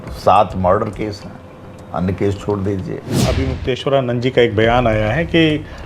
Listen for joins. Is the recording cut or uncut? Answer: cut